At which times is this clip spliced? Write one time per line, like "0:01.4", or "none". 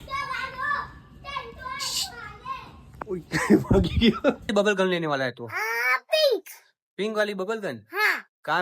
0:04.4